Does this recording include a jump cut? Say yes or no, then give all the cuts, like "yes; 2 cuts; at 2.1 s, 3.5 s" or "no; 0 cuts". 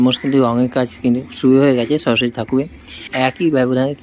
yes; 1 cut; at 3.0 s